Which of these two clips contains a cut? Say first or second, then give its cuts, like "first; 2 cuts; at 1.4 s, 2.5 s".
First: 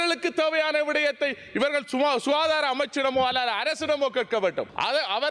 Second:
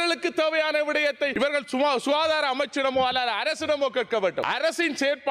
second; 2 cuts; at 1.3 s, 4.4 s